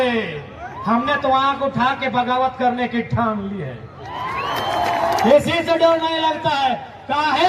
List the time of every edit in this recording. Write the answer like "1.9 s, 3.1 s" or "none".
5.2 s